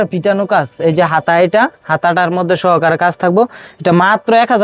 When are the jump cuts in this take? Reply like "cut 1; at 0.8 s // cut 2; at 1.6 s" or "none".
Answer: none